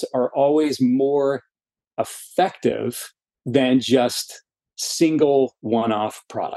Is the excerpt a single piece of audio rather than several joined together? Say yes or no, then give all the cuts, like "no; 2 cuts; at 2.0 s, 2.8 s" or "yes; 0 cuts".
yes; 0 cuts